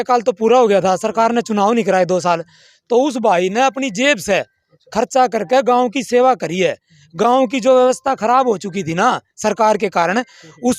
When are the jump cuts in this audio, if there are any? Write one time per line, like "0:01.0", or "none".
none